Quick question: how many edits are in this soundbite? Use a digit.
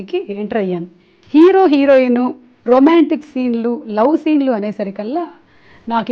1